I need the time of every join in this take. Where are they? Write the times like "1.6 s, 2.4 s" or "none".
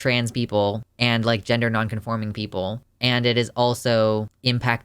2.9 s

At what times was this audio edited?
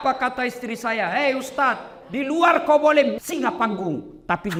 none

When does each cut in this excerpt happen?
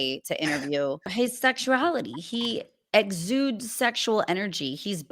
1.1 s

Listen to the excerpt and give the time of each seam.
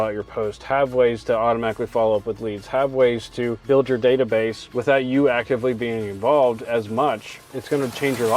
3.6 s

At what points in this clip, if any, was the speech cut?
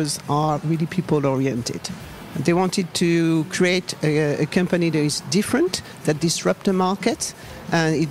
2.2 s

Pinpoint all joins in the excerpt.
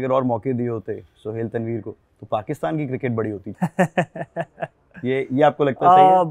3.4 s

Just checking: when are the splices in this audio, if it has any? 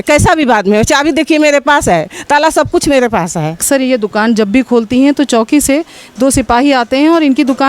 3.6 s

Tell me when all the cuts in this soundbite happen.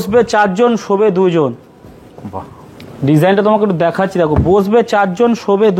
none

